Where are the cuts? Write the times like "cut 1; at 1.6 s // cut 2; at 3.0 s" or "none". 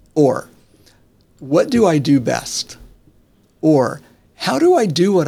none